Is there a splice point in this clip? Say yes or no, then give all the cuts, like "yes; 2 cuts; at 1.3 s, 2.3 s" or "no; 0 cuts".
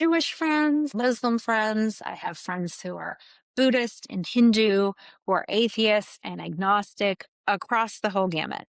yes; 1 cut; at 0.9 s